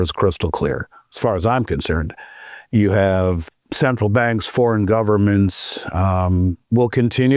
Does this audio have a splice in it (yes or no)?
no